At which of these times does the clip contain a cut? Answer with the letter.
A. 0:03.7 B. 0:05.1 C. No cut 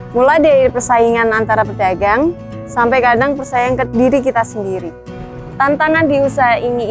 B